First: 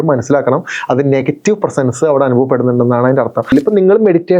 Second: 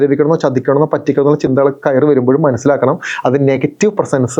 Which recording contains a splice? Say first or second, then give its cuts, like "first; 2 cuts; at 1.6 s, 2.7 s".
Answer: first; 1 cut; at 3.5 s